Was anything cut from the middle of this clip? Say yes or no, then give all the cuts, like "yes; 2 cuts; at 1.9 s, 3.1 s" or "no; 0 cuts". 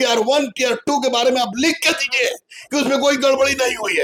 no; 0 cuts